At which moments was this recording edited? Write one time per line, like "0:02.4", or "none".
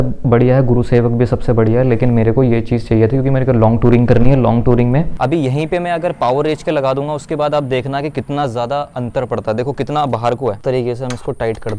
0:05.1
0:10.6